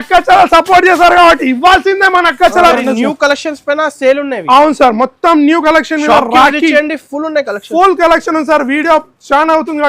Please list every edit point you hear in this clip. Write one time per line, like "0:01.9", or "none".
0:02.7